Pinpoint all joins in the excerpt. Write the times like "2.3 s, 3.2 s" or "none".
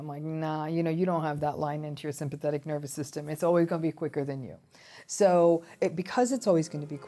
5.7 s